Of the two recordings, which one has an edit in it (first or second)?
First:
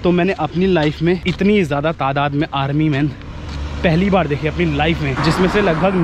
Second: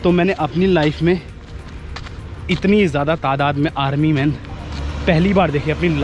first